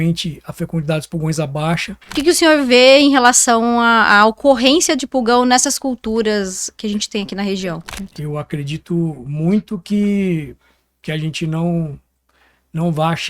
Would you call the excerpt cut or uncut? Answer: cut